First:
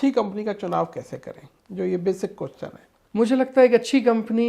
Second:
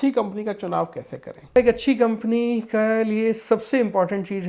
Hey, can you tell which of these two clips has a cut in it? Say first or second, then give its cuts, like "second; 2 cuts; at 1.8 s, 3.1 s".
second; 1 cut; at 1.6 s